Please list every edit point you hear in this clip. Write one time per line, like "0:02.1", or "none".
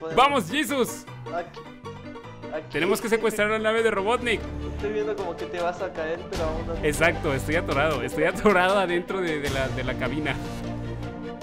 0:04.4